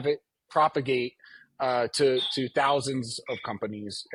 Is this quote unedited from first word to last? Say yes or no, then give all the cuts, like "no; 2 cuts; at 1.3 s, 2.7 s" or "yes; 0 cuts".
yes; 0 cuts